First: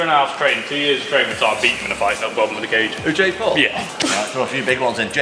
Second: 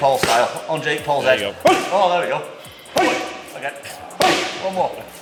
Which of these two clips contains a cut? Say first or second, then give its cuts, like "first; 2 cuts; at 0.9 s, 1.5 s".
first; 1 cut; at 3.9 s